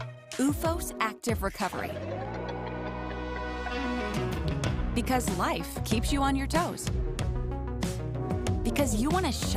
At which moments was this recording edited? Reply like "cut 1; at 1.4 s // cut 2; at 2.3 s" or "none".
none